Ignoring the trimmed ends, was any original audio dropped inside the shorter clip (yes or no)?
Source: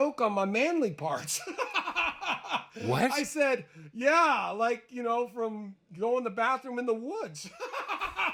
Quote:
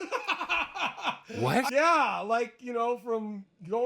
yes